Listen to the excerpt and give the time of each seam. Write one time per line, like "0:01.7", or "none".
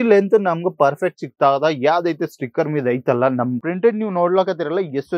0:03.6